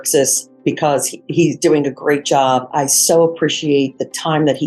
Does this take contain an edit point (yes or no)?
yes